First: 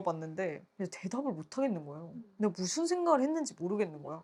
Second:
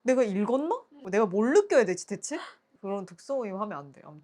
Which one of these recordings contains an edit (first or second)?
second